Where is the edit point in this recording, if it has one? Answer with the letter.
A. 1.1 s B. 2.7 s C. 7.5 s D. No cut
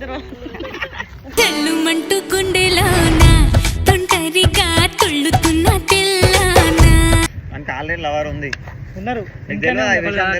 C